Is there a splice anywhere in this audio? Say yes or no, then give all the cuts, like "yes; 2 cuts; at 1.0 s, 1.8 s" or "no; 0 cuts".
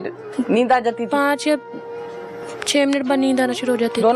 no; 0 cuts